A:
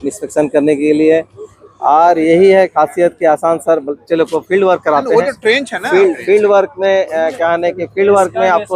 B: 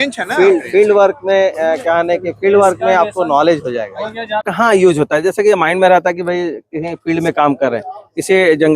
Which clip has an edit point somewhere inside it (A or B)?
B